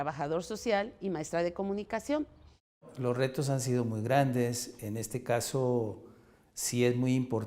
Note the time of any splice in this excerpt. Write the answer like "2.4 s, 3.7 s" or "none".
2.8 s